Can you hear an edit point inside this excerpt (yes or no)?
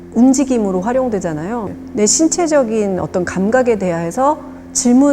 yes